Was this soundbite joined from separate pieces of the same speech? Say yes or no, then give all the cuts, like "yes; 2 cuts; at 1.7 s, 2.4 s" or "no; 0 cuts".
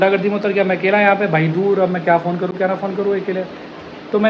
no; 0 cuts